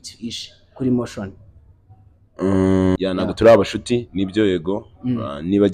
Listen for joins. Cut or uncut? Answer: cut